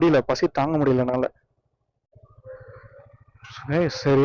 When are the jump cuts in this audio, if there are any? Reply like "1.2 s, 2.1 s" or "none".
2.0 s